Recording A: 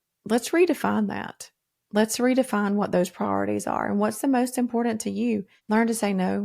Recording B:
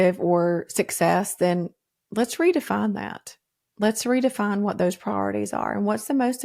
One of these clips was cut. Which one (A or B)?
A